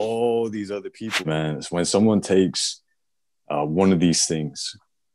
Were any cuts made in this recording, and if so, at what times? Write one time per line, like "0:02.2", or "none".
0:01.3